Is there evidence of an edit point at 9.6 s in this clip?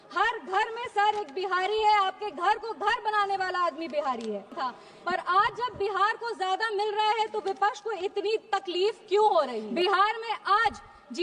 yes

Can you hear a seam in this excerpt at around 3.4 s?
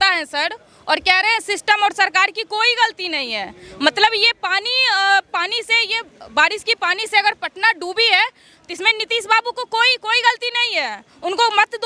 no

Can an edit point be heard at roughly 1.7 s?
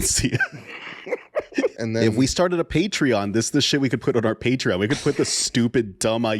yes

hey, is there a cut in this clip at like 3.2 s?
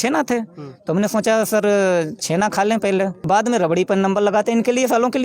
yes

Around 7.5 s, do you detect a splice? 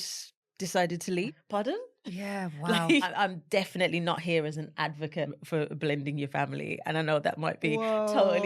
no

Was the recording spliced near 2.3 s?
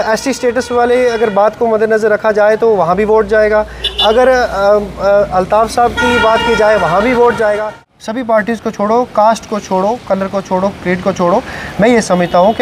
no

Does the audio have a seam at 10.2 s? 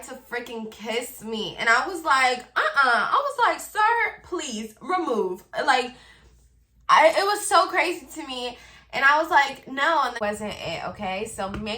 yes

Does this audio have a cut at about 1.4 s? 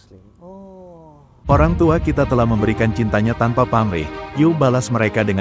yes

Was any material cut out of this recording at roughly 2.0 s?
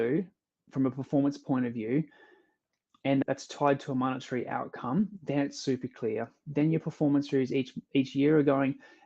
no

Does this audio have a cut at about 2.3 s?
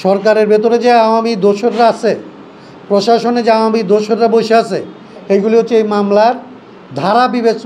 no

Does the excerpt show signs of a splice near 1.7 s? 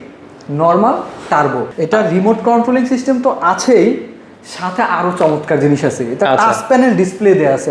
yes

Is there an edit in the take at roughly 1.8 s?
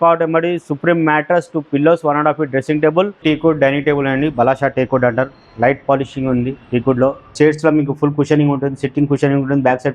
no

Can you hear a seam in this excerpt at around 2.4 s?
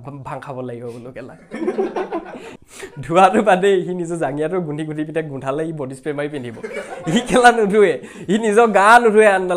yes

